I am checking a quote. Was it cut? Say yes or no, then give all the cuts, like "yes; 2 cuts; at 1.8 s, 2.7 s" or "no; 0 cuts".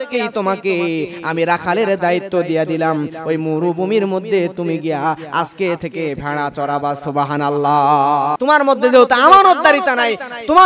yes; 1 cut; at 8.4 s